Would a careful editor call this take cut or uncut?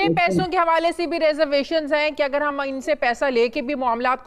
uncut